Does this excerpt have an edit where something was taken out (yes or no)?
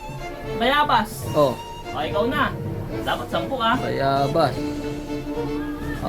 no